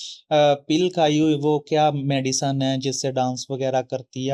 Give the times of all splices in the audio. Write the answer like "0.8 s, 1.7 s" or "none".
none